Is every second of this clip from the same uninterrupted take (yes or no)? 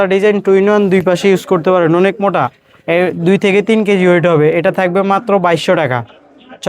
yes